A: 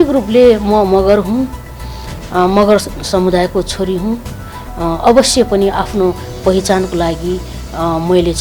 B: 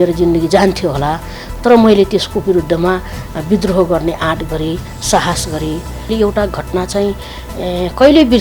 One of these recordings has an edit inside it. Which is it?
B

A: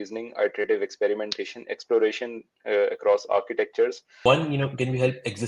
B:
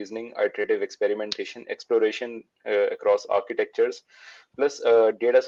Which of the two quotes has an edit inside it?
A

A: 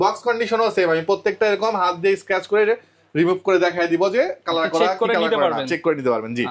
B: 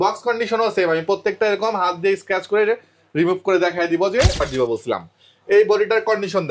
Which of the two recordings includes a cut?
B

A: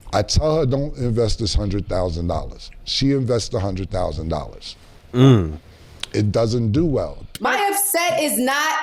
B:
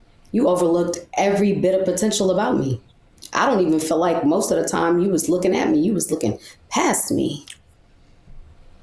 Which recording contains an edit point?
A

